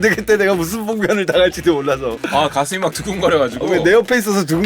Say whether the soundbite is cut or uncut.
cut